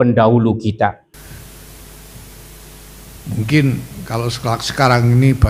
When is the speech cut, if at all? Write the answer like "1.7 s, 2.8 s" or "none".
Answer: 1.2 s

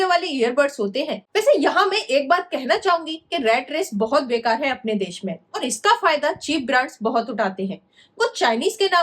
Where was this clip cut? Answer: 1.2 s

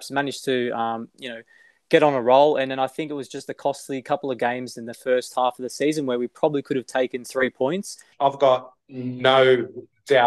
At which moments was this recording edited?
8.0 s

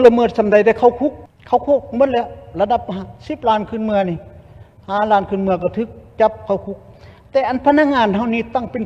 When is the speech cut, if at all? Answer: 1.3 s

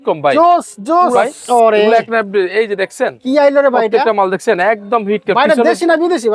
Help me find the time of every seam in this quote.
1.2 s

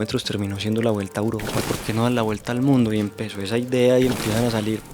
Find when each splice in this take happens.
1.5 s, 4.2 s

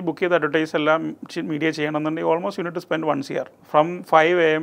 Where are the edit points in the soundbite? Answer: 3.6 s

